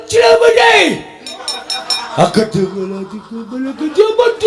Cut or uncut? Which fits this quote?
uncut